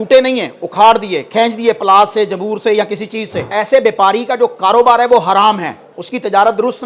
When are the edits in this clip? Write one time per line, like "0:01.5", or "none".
0:03.5

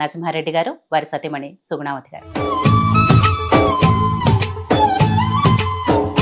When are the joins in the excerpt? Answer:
0:02.3

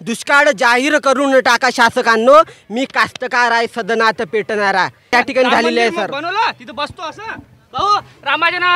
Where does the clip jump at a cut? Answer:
0:05.1

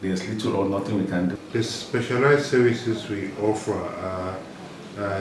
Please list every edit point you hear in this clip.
0:01.4

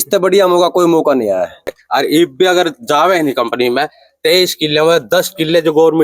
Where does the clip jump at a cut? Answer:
0:01.6

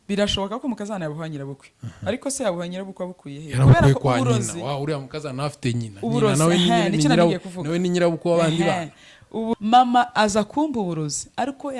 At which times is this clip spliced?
0:09.5

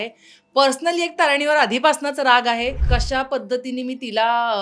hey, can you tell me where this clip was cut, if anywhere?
0:02.8

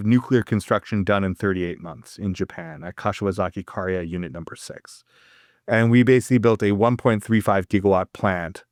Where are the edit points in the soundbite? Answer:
none

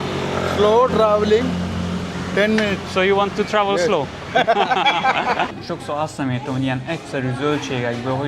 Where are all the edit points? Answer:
0:05.5

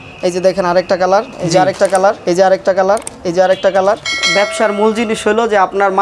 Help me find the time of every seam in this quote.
0:01.3
0:02.2
0:04.2

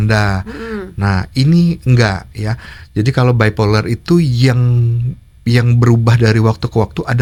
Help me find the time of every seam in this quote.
none

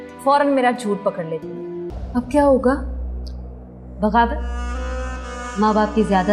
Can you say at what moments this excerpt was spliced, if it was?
0:01.9

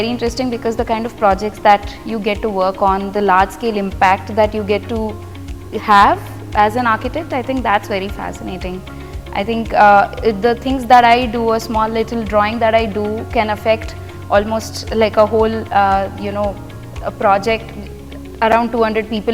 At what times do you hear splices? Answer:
none

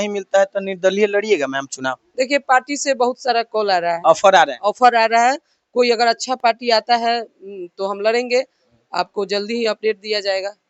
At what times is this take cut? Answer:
none

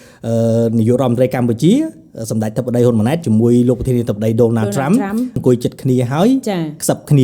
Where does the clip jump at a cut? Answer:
0:05.3

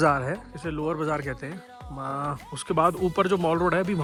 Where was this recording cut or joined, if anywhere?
none

